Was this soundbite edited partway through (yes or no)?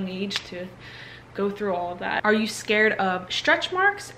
yes